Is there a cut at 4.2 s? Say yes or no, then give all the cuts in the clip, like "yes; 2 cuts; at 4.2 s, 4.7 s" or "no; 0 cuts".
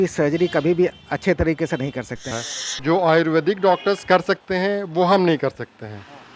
no; 1 cut; at 2.3 s